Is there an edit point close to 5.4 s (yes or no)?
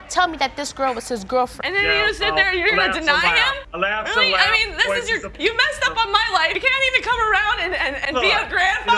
no